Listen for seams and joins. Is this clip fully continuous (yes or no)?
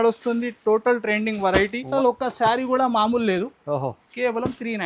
no